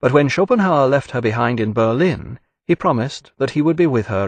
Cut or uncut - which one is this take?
uncut